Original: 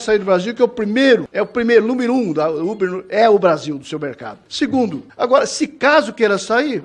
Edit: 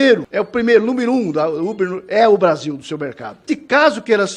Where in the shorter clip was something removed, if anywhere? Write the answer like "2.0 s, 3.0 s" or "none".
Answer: 3.4 s

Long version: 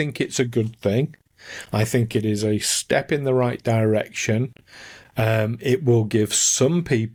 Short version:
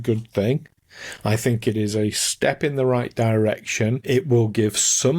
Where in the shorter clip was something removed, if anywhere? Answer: 4.0 s

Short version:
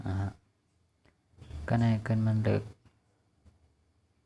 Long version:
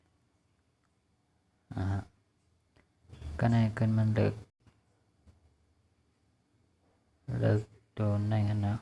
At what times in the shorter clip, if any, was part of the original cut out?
2.8 s

